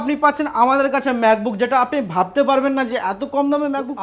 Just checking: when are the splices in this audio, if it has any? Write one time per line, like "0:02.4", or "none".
none